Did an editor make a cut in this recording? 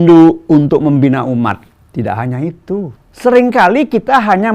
yes; 2 cuts; at 1.7 s, 3.0 s

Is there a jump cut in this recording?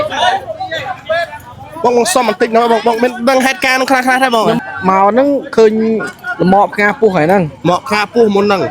yes; 1 cut; at 4.6 s

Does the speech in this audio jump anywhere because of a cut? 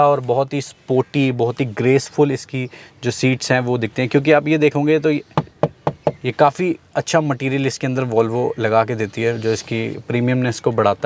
no; 0 cuts

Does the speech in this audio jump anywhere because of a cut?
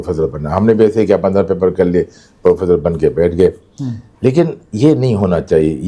no; 0 cuts

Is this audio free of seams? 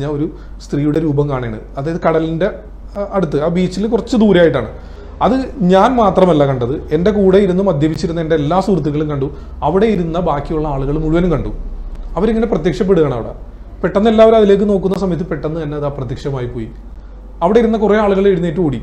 yes; 0 cuts

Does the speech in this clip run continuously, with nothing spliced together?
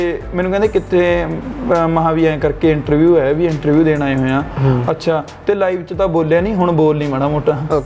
yes; 0 cuts

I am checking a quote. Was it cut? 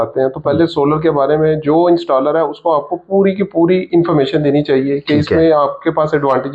no; 0 cuts

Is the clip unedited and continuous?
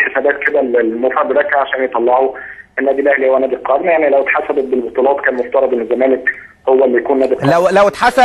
no; 1 cut; at 1.1 s

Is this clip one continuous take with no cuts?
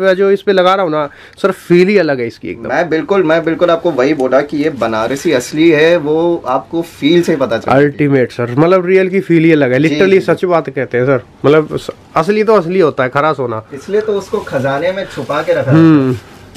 yes; 0 cuts

